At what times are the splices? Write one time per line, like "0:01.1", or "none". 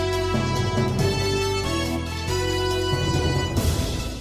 none